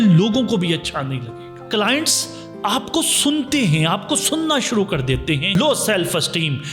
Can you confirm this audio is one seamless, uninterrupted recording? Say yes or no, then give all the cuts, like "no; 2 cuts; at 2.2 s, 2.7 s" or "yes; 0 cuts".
no; 2 cuts; at 1.5 s, 5.5 s